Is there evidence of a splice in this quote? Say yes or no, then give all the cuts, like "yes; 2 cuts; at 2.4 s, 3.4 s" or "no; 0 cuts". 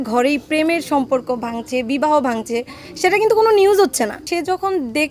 yes; 1 cut; at 4.2 s